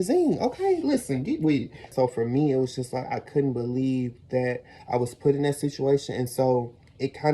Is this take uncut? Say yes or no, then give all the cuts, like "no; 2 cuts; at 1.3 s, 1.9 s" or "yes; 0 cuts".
no; 1 cut; at 1.9 s